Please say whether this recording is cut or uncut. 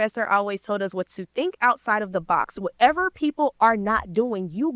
uncut